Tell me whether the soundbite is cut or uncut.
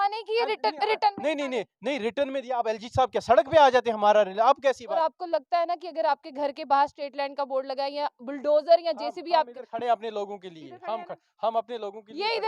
cut